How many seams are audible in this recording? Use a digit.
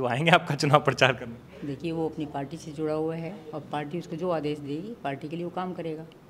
0